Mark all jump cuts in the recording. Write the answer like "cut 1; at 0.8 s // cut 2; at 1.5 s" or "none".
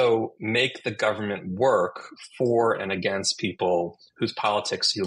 none